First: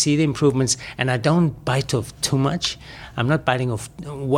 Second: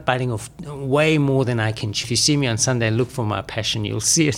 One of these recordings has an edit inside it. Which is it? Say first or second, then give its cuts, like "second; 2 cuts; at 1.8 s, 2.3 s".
second; 1 cut; at 2.0 s